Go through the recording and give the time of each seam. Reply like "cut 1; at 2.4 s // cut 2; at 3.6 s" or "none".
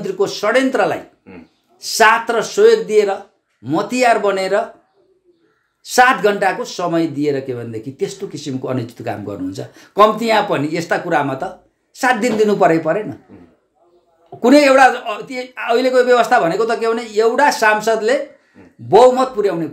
none